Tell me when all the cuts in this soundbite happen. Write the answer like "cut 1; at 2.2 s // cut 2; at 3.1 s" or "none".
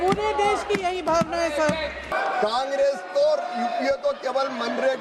cut 1; at 2.1 s